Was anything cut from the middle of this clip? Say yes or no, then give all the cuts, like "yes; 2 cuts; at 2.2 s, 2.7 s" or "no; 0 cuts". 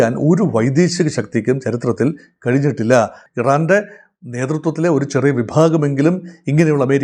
yes; 1 cut; at 3.2 s